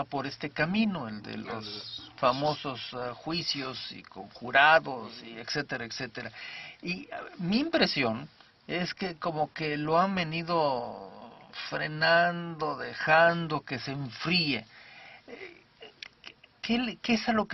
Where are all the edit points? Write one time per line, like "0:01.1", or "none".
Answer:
none